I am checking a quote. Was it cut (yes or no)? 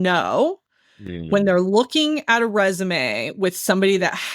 no